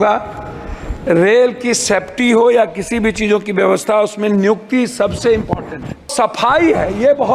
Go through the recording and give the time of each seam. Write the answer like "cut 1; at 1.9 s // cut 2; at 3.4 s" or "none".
cut 1; at 6.1 s